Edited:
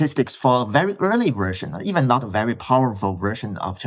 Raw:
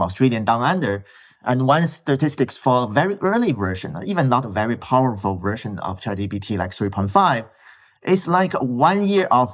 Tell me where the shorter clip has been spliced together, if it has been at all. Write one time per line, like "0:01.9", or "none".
none